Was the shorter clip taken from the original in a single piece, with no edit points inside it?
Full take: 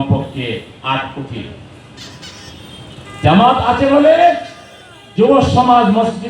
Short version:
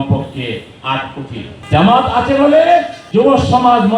no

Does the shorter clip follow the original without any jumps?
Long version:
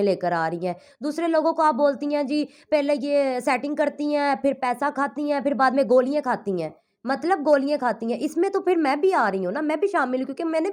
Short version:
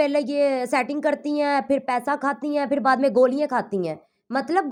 yes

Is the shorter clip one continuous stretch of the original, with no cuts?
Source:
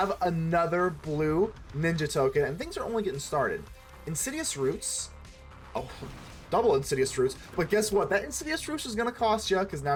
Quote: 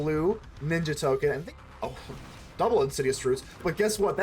no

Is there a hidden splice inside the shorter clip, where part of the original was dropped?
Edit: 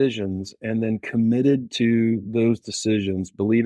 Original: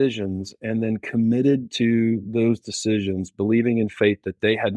no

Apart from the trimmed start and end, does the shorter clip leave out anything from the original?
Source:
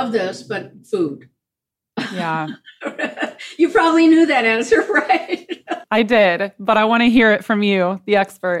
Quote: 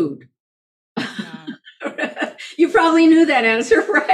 no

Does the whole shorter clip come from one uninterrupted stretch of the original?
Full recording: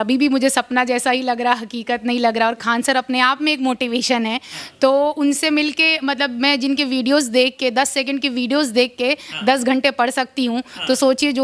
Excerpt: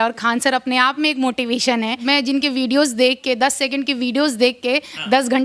no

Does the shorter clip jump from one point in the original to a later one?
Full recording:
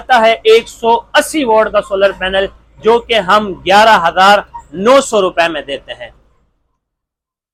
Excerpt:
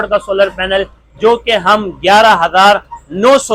no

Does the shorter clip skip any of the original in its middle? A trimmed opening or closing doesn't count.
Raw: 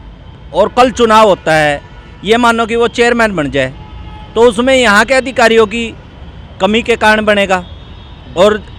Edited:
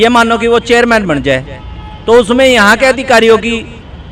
no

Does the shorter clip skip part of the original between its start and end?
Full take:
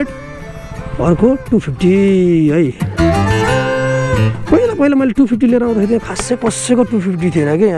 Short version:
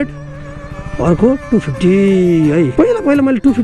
yes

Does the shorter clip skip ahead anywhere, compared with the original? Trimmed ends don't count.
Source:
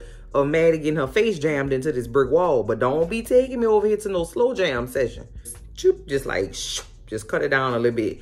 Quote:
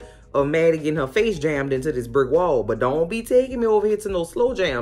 no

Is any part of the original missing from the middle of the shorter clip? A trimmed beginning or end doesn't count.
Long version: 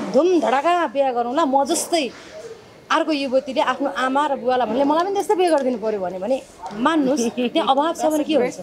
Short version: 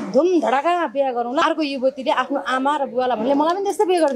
yes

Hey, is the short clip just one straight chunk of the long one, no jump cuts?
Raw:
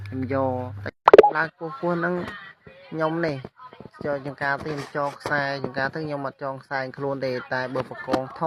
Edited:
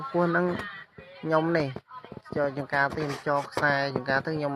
yes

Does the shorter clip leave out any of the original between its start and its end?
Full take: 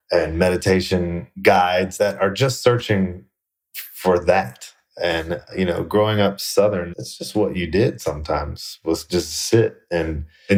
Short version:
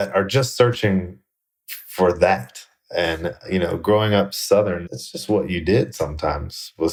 no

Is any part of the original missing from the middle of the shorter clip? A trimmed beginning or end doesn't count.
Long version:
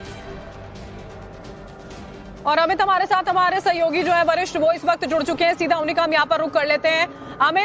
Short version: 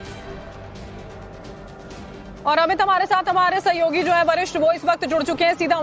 no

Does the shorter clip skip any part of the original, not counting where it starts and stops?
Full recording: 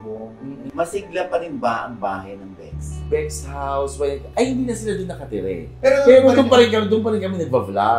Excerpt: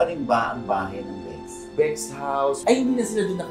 yes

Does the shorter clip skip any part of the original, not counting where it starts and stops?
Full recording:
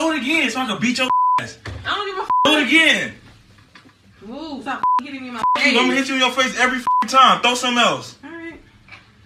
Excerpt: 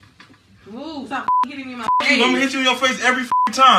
no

